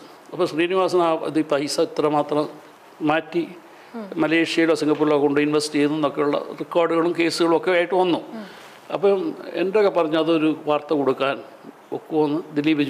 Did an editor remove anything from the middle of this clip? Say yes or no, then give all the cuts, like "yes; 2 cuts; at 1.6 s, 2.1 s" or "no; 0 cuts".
no; 0 cuts